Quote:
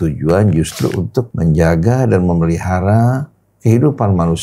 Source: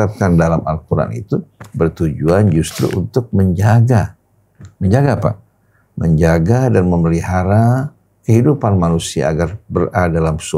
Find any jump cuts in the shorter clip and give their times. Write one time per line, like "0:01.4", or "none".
0:01.3

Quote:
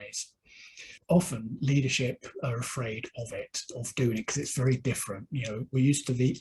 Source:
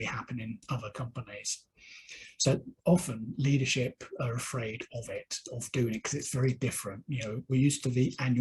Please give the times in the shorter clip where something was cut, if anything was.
0:00.9

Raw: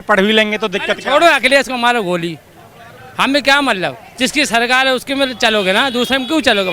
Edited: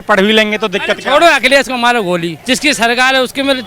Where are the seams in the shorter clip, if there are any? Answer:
0:02.3

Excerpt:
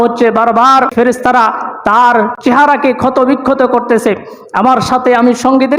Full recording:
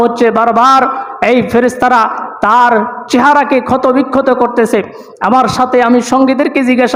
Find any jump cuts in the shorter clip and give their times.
0:00.9
0:02.3

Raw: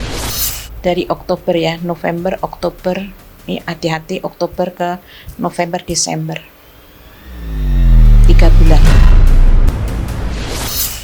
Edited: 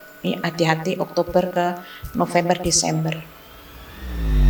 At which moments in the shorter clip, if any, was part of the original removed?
none

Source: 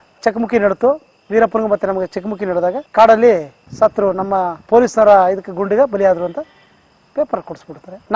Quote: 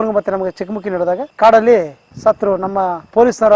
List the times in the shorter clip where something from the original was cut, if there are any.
none

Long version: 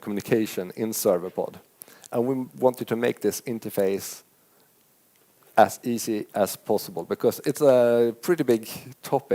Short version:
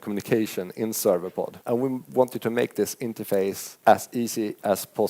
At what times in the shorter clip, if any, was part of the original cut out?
0:01.6
0:03.7

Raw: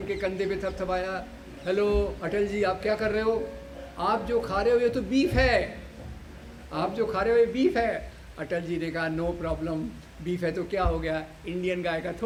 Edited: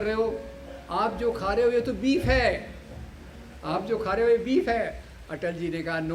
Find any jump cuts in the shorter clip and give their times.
none

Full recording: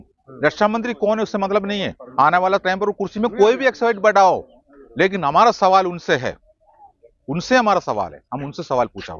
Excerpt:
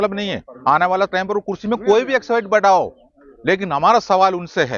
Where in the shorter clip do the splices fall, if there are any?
none

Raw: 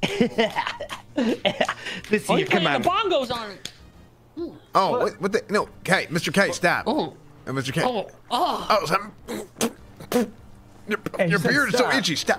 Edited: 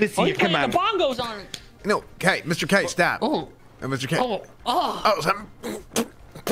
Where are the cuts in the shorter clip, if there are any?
0:01.8

